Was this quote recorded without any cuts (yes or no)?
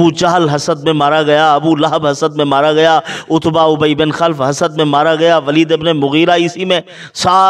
yes